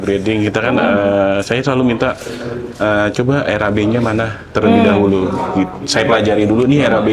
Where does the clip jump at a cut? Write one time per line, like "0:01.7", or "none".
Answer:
none